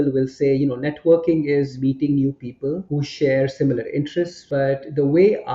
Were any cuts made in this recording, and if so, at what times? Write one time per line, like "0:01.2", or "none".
0:01.7
0:02.9
0:04.4

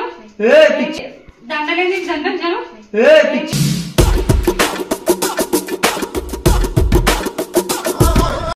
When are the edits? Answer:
none

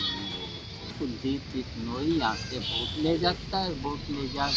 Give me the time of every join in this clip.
0:00.9

